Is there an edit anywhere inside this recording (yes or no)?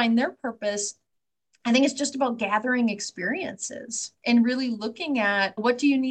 no